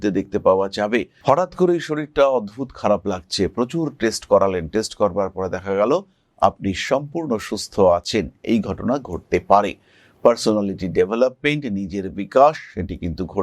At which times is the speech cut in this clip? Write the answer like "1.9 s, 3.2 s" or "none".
1.2 s